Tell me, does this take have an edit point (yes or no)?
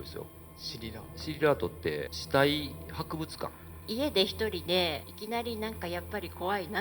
yes